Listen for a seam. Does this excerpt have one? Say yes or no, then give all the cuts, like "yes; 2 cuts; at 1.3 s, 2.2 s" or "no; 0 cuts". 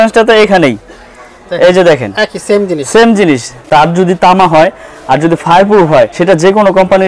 yes; 2 cuts; at 3.5 s, 6.1 s